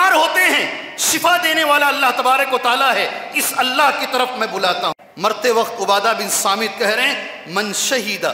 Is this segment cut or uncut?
cut